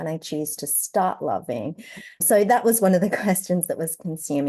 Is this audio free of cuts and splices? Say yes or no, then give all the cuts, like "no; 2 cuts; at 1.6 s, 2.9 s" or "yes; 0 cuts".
yes; 0 cuts